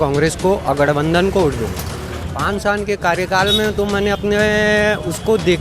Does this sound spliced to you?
yes; 1 cut; at 2.2 s

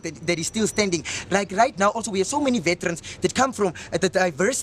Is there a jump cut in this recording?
no; 0 cuts

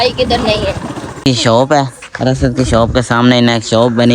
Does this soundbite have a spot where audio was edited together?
yes; 1 cut; at 1.2 s

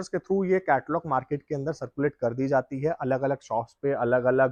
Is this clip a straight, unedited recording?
yes; 0 cuts

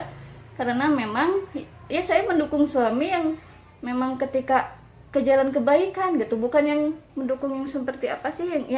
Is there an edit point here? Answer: no; 0 cuts

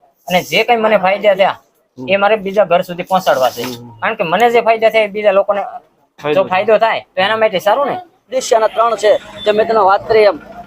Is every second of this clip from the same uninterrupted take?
no; 1 cut; at 8.4 s

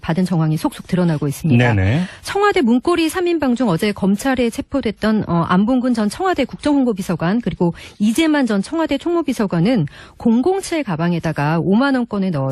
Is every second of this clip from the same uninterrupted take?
no; 1 cut; at 11.4 s

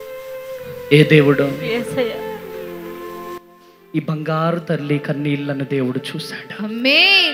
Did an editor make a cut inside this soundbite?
no; 0 cuts

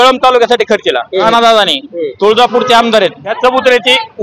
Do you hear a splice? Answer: yes; 2 cuts; at 1.3 s, 3.3 s

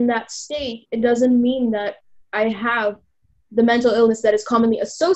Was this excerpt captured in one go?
yes; 0 cuts

